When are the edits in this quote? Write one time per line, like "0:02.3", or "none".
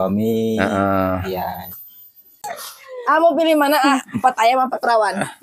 0:02.5